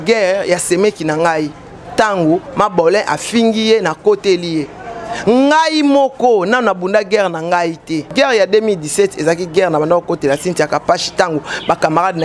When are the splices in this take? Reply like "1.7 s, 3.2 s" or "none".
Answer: 8.1 s